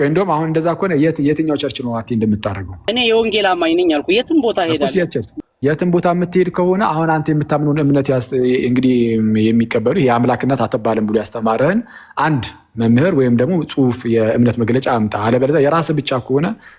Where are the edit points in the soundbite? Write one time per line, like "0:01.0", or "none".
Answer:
0:02.8
0:05.2